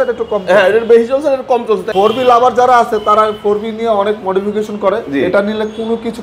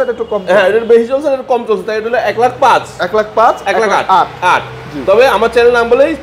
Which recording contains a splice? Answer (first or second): first